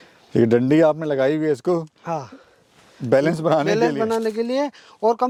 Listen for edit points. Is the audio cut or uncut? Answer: uncut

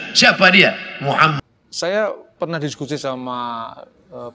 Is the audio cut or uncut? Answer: cut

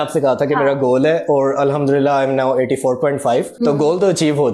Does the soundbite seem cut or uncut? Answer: cut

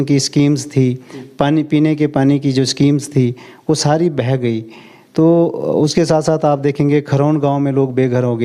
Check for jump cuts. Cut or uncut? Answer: uncut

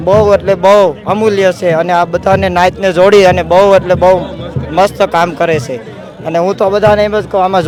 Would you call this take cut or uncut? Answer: uncut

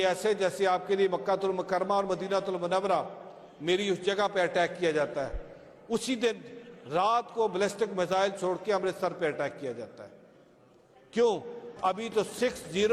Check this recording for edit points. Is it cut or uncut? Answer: cut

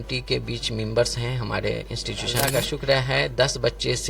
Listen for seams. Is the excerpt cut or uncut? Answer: cut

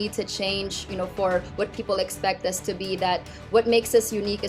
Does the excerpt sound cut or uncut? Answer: uncut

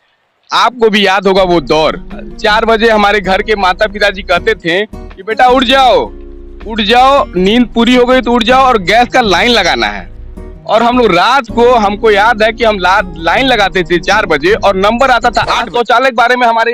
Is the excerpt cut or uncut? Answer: cut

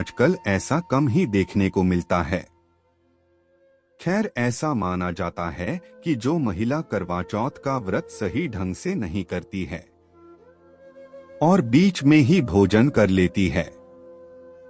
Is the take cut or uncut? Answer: uncut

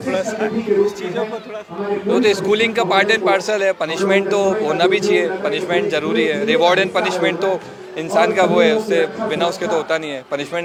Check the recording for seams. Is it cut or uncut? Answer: uncut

